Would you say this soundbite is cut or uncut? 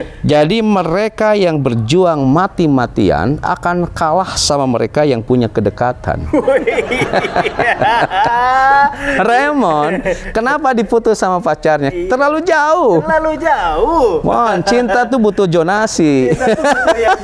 uncut